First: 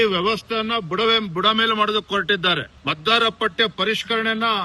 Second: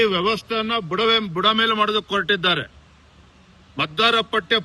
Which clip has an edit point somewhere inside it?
first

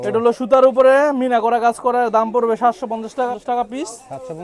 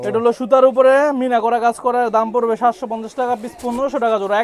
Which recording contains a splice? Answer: first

